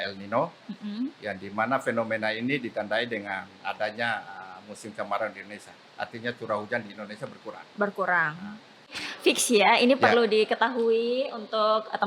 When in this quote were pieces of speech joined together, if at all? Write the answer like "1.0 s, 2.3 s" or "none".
9.0 s